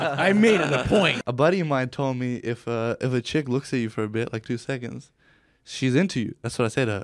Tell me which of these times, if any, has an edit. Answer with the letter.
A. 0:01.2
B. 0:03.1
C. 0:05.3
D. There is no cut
A